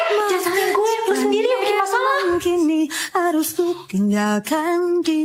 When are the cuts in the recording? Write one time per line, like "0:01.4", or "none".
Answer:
none

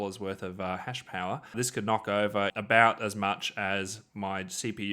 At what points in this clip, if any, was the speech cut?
0:01.5
0:02.5

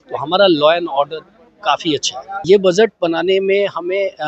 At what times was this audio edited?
0:02.4

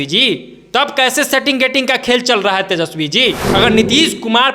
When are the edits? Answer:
0:03.4

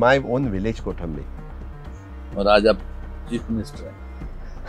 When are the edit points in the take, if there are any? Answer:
none

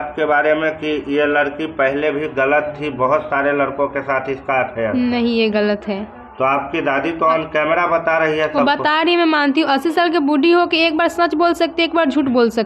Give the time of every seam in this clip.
none

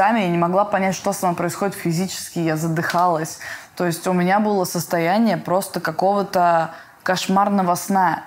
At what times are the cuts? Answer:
none

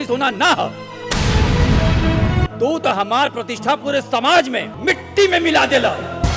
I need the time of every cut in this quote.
0:02.4
0:04.7

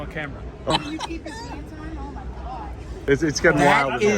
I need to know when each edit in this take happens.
0:00.7
0:03.1

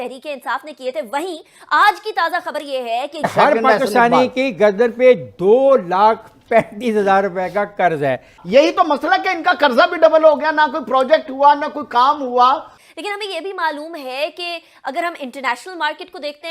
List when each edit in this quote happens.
0:03.2
0:08.4
0:12.8

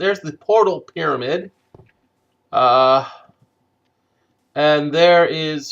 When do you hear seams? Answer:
0:04.6

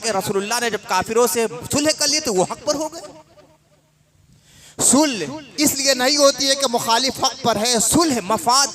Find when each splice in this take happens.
none

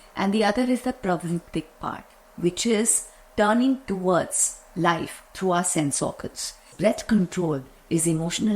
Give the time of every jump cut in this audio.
0:06.7

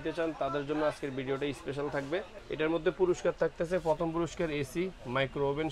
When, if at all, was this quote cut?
0:02.4

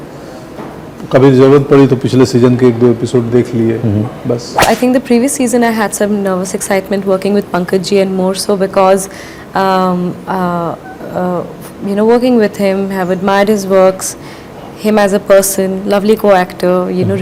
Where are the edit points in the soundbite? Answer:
0:04.6

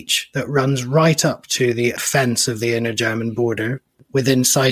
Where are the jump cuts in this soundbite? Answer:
0:02.0

